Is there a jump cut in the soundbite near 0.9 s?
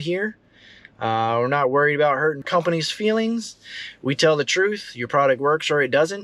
no; 1 cut; at 2.5 s

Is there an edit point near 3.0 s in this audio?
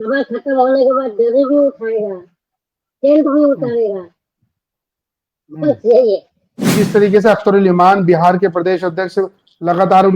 no; 1 cut; at 6.6 s

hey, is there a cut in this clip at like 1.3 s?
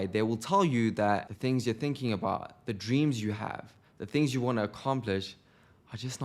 yes; 1 cut; at 1.3 s

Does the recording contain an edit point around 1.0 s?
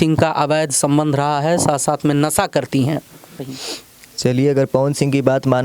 no; 1 cut; at 3.5 s

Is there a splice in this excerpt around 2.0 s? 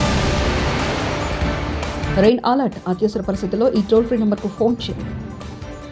no; 0 cuts

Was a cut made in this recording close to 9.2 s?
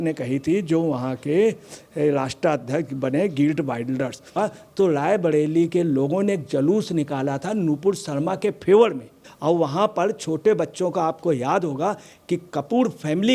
yes; 2 cuts; at 4.3 s, 9.2 s

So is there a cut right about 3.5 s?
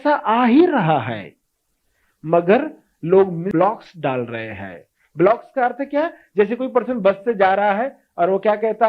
yes; 1 cut; at 3.5 s

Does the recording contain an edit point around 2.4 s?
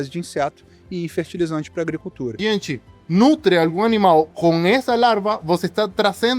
yes; 1 cut; at 2.4 s

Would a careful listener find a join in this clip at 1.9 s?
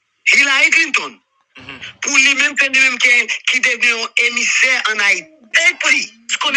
no; 1 cut; at 5.3 s

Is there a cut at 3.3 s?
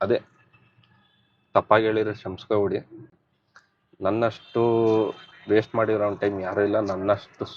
yes; 1 cut; at 3.3 s

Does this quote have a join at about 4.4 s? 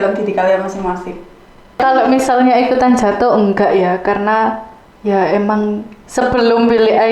no; 1 cut; at 1.8 s

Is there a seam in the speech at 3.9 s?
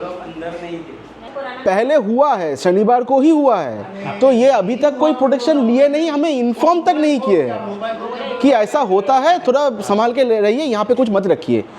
no; 1 cut; at 1.3 s

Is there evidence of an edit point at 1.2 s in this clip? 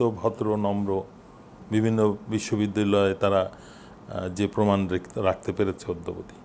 no; 0 cuts

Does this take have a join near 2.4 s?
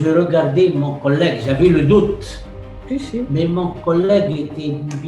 no; 0 cuts

